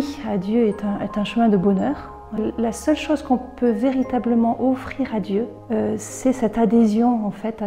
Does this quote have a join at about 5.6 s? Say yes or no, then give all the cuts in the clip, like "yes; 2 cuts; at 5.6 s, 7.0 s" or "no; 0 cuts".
yes; 2 cuts; at 2.4 s, 5.6 s